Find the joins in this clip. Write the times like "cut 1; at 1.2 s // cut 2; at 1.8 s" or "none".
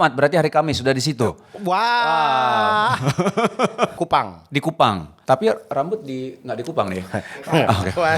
cut 1; at 3.9 s // cut 2; at 5.1 s